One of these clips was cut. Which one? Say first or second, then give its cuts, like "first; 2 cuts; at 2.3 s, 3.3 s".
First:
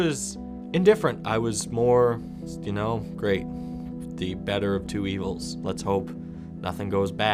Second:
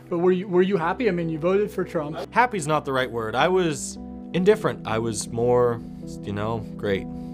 second; 1 cut; at 2.2 s